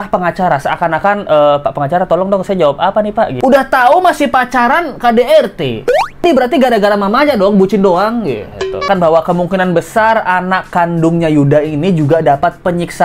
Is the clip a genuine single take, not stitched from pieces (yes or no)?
no